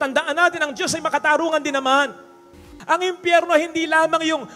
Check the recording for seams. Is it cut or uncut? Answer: cut